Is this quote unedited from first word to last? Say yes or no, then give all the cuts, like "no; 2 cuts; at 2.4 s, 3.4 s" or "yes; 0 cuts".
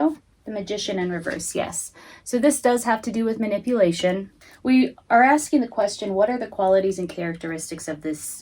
no; 1 cut; at 4.3 s